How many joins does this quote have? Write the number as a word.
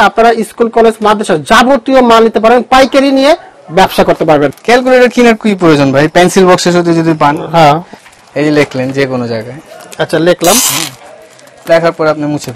two